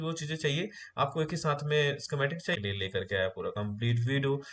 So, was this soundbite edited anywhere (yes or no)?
yes